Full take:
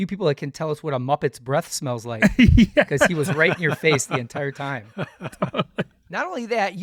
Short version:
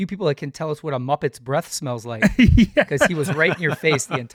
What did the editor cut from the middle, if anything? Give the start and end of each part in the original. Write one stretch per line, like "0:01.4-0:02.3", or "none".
none